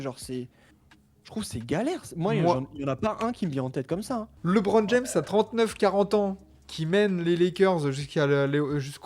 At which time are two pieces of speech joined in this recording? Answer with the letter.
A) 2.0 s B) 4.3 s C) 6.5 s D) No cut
B